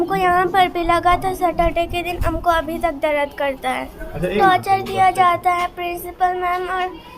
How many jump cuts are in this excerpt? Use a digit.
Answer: 1